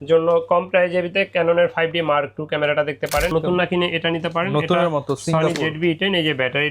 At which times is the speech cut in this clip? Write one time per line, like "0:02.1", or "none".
0:03.3